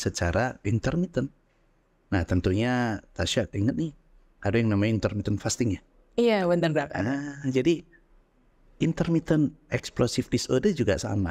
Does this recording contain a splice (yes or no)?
no